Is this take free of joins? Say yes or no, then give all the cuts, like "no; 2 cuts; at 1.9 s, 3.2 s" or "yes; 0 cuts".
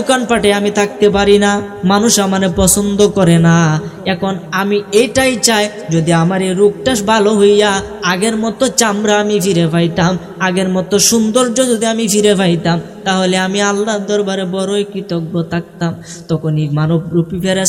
yes; 0 cuts